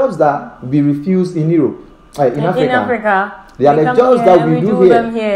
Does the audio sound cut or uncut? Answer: uncut